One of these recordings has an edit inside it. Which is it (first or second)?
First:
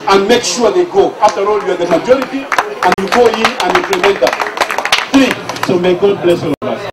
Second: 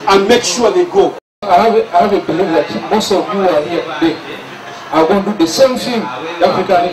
second